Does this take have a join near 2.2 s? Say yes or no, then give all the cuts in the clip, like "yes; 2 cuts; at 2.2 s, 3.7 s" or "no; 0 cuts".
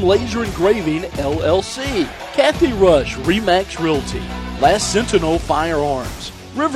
yes; 1 cut; at 2.2 s